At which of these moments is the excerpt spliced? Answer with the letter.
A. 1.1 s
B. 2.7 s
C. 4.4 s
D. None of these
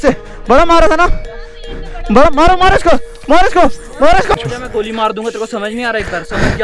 C